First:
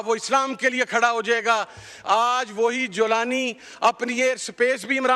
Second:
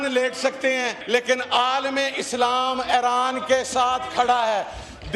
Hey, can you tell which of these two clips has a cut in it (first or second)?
second